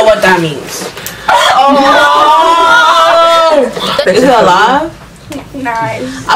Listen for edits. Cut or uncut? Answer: cut